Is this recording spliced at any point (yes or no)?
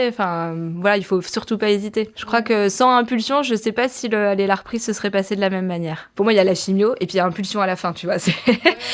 yes